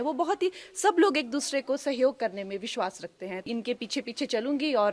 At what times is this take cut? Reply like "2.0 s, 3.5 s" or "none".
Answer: 3.4 s